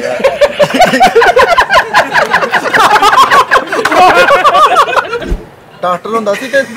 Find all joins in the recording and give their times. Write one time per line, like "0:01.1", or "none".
0:05.2

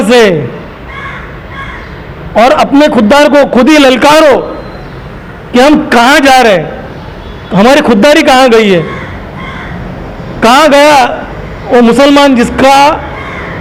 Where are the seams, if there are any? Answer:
none

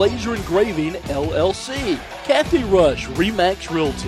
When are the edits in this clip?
0:02.1

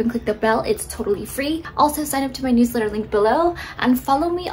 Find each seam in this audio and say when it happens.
0:01.7

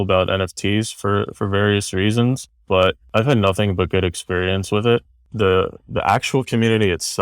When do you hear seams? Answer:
0:05.2

